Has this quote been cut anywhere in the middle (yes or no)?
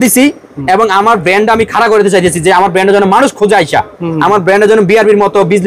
no